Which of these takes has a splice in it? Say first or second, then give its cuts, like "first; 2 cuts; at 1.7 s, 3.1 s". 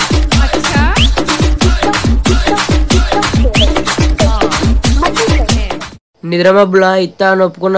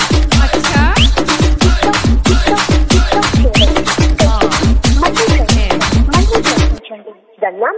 first; 1 cut; at 5.7 s